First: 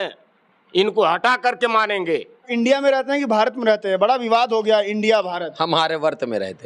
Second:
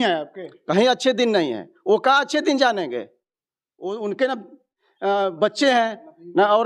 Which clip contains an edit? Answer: first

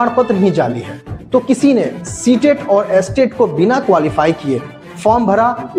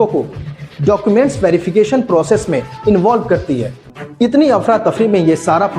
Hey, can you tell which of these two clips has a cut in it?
second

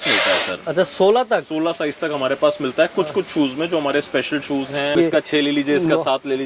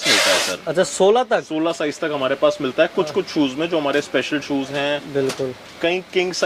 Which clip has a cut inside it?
first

